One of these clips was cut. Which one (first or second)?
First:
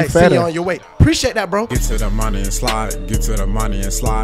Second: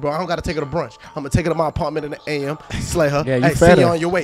first